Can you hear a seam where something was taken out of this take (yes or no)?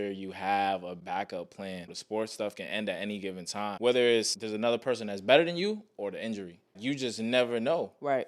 yes